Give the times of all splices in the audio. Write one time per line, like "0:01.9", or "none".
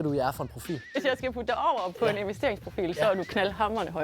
0:01.0